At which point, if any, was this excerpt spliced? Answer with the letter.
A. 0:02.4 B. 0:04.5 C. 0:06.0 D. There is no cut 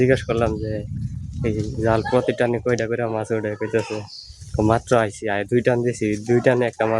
D